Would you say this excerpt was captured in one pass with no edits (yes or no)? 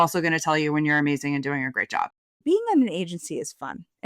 no